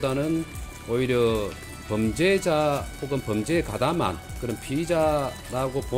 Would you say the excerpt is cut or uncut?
cut